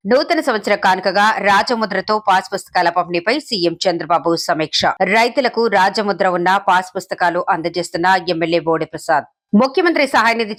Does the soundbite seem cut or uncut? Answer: uncut